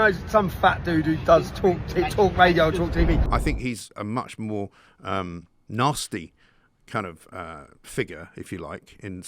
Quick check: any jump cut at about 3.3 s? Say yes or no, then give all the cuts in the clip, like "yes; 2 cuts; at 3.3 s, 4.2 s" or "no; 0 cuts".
yes; 1 cut; at 3.3 s